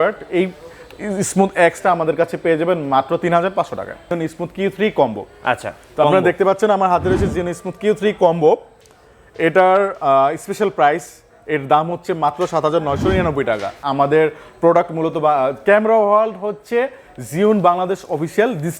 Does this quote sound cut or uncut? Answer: cut